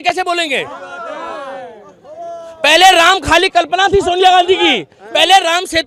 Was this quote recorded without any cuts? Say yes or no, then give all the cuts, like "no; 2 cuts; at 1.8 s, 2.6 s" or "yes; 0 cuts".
yes; 0 cuts